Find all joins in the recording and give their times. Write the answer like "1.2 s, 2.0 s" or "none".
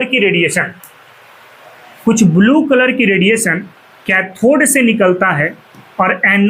none